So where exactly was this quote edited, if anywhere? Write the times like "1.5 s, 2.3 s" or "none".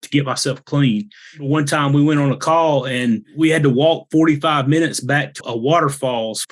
1.5 s, 3.3 s, 5.4 s